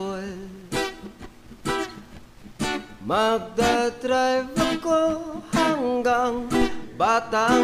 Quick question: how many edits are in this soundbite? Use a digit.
0